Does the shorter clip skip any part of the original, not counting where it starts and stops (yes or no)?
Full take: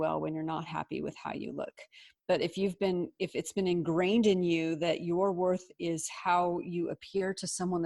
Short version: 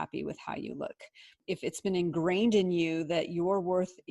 yes